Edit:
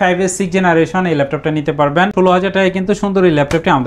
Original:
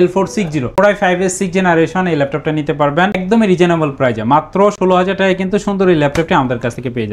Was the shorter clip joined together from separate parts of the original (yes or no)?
yes